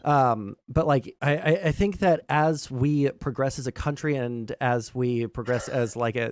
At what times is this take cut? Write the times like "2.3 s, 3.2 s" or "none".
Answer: 1.1 s